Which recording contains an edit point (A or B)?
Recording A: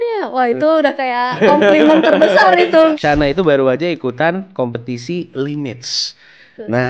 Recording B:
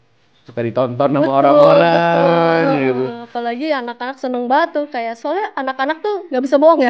A